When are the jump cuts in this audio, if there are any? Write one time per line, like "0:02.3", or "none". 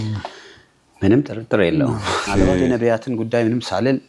0:02.3